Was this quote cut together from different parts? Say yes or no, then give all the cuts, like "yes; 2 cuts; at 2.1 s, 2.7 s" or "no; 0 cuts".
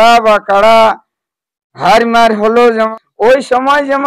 yes; 1 cut; at 2.9 s